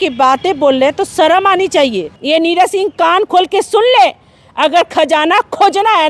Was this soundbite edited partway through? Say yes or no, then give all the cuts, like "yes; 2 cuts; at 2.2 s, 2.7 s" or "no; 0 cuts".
yes; 1 cut; at 2.1 s